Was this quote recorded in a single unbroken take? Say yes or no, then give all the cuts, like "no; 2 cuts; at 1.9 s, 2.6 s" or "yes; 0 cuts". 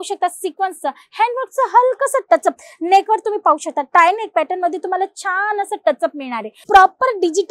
no; 1 cut; at 6.5 s